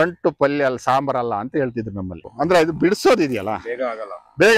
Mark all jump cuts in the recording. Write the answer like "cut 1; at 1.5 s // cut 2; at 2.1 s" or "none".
cut 1; at 2.2 s